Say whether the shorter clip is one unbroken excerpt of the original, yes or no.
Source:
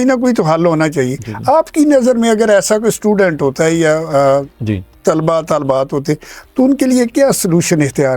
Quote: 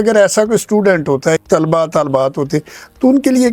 no